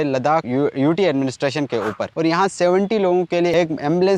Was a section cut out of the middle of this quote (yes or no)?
yes